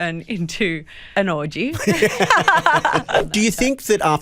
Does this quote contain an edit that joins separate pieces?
yes; 2 cuts; at 1.0 s, 3.2 s

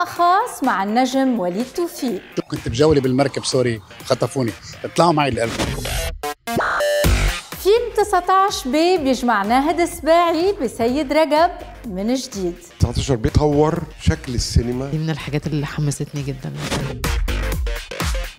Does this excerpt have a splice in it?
yes; 1 cut; at 2.2 s

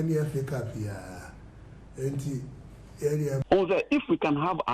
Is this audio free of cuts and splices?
no; 1 cut; at 3.4 s

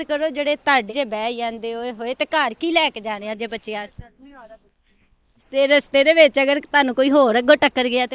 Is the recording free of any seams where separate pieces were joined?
no; 2 cuts; at 0.9 s, 5.5 s

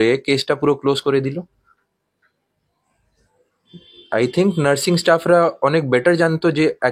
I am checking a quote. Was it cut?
no; 0 cuts

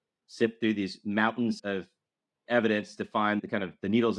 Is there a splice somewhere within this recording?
no; 0 cuts

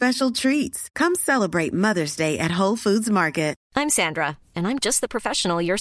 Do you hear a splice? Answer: yes; 1 cut; at 3.6 s

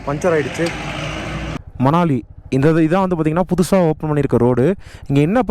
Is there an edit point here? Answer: yes; 1 cut; at 1.4 s

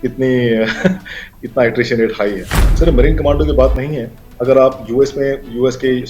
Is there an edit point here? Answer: yes; 1 cut; at 2.7 s

